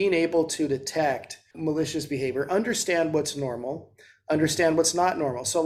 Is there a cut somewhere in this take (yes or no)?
yes